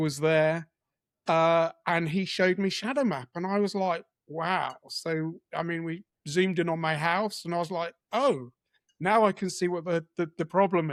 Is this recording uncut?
yes; 0 cuts

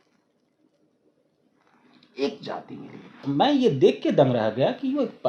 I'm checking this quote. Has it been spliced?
yes; 1 cut; at 3.3 s

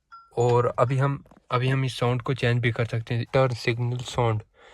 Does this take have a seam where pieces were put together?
yes; 1 cut; at 3.2 s

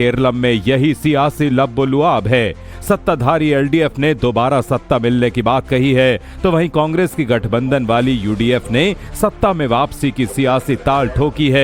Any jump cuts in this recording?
no; 0 cuts

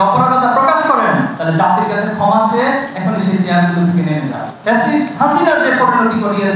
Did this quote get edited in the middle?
yes; 1 cut; at 4.6 s

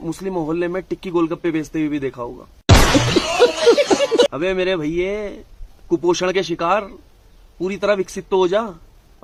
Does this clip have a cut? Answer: no; 0 cuts

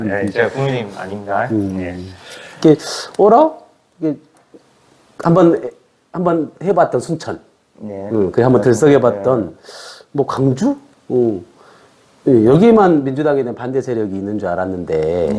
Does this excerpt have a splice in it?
no; 0 cuts

